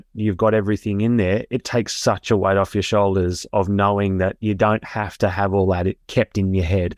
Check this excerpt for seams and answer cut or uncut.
uncut